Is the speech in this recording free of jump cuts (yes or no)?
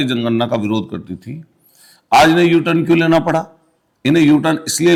yes